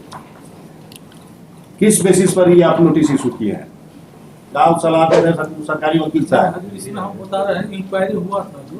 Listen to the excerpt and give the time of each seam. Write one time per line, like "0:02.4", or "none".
0:04.5